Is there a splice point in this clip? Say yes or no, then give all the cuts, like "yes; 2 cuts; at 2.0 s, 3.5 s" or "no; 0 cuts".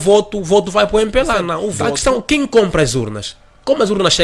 yes; 1 cut; at 1.7 s